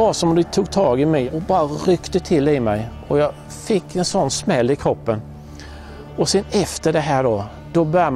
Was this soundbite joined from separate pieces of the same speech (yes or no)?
yes